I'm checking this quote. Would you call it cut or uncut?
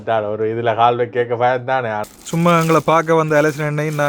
cut